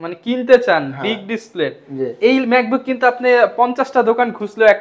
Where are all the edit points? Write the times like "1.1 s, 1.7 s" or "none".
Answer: none